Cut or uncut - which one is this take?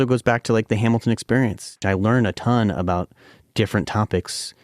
cut